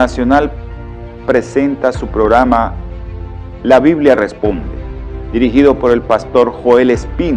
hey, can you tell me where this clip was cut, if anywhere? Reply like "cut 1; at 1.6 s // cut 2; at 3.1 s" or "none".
cut 1; at 1.5 s